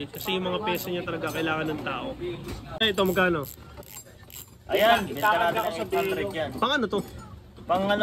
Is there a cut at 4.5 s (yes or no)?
no